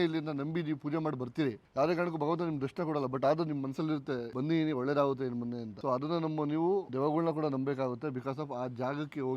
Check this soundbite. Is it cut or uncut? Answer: cut